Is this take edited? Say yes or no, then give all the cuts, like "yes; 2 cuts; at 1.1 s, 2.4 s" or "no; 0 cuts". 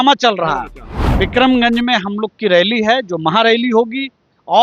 yes; 1 cut; at 0.9 s